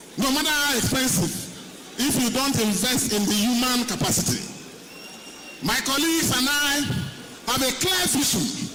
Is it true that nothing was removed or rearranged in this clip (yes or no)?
yes